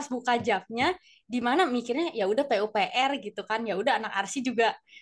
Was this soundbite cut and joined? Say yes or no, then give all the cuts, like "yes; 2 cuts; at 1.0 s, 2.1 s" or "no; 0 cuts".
no; 0 cuts